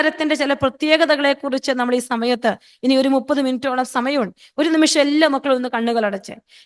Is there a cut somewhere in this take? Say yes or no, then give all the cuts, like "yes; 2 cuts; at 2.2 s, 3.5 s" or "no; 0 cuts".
no; 0 cuts